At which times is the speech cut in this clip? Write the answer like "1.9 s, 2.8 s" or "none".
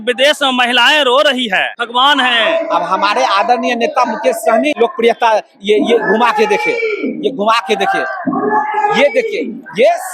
1.8 s, 4.8 s